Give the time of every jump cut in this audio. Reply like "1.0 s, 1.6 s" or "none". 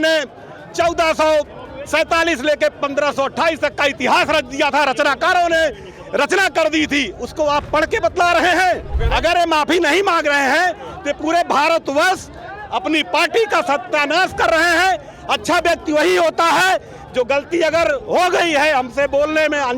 8.9 s